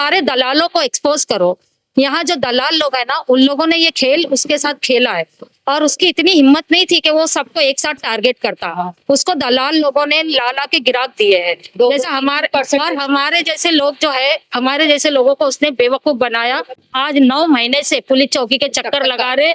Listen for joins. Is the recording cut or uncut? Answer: cut